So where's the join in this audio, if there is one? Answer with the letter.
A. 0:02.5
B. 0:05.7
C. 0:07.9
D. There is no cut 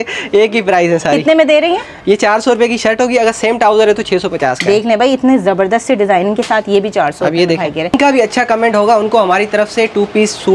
C